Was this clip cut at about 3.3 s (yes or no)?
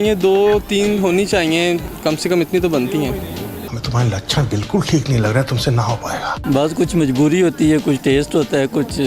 no